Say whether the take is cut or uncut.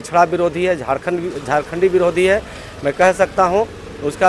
uncut